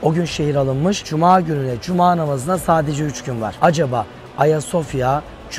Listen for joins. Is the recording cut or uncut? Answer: cut